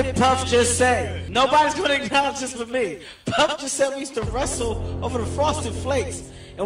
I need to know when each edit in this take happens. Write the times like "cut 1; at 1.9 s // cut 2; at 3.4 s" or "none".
cut 1; at 1.2 s